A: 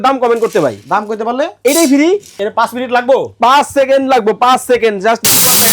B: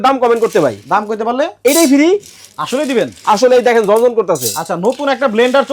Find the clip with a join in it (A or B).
A